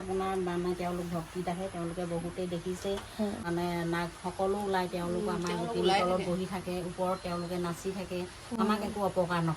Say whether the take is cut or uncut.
cut